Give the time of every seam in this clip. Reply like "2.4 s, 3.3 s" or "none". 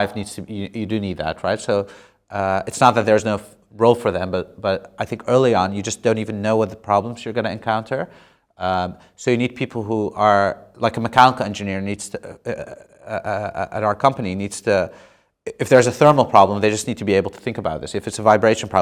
none